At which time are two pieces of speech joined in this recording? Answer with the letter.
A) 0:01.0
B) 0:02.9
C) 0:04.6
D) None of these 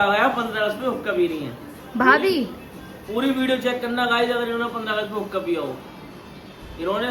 D